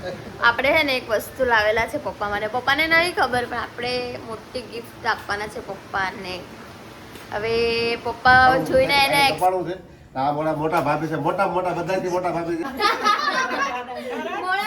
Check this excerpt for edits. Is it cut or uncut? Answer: cut